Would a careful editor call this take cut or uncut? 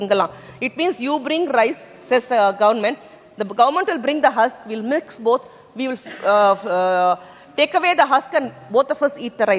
uncut